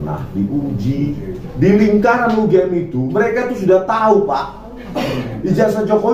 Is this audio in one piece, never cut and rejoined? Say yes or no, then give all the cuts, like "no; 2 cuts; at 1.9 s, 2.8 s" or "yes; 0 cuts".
no; 1 cut; at 1.4 s